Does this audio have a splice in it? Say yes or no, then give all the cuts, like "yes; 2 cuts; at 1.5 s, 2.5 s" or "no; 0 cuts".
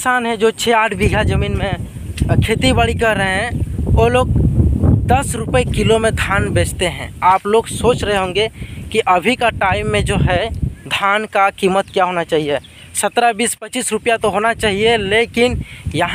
no; 0 cuts